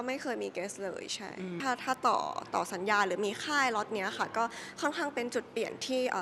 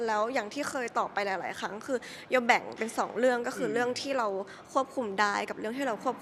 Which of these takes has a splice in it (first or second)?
first